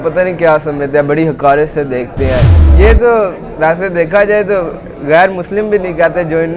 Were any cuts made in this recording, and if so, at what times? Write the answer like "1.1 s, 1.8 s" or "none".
2.5 s